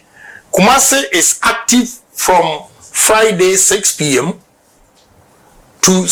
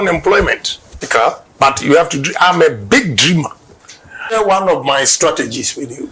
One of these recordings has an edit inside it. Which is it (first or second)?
second